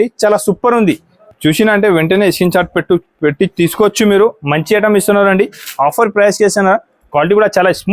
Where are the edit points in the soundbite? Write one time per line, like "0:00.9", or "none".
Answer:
0:01.1

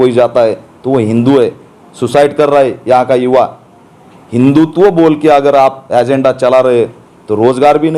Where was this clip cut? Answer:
none

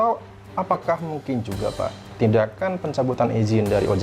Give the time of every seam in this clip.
none

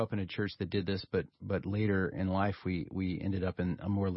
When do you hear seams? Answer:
none

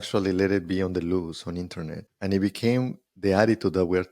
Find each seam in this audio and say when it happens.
0:02.0

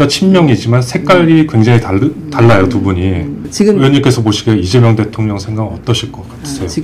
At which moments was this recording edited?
0:03.4

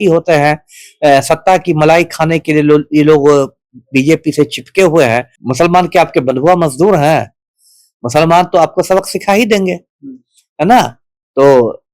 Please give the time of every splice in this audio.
0:05.4

